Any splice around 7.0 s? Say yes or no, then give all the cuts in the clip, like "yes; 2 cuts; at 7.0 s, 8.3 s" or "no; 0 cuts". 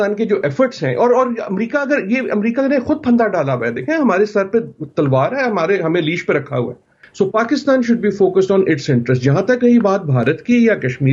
yes; 1 cut; at 7.0 s